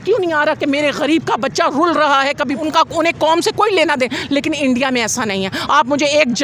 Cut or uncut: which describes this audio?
cut